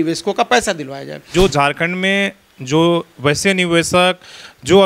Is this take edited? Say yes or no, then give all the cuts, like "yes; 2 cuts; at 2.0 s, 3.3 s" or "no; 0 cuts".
yes; 1 cut; at 1.2 s